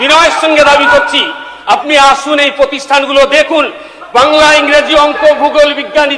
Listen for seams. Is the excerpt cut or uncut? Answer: uncut